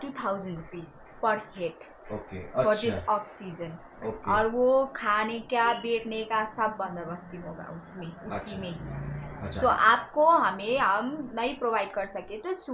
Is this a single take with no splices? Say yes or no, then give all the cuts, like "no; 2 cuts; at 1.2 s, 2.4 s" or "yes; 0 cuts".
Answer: yes; 0 cuts